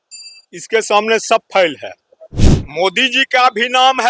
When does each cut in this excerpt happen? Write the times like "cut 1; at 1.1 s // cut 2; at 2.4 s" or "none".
cut 1; at 2.4 s